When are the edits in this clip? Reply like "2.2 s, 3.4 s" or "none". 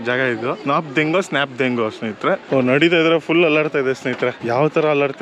2.4 s